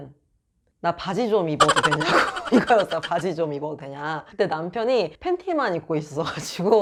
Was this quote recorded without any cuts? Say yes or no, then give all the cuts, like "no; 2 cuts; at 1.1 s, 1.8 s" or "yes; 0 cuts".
yes; 0 cuts